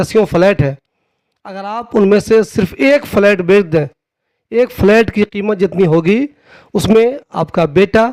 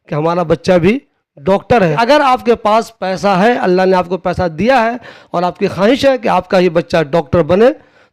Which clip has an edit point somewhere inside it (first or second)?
second